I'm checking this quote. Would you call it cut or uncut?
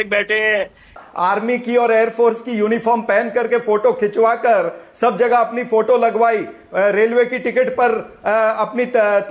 cut